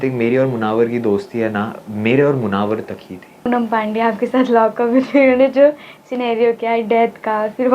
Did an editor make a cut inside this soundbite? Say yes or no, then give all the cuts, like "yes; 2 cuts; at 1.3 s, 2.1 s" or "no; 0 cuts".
yes; 1 cut; at 3.5 s